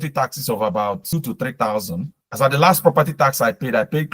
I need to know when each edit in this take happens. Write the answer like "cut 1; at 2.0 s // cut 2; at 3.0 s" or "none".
cut 1; at 1.0 s // cut 2; at 2.2 s